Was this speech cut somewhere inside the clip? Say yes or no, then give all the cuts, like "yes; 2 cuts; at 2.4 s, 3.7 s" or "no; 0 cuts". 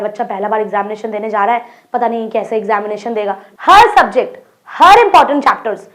yes; 1 cut; at 3.5 s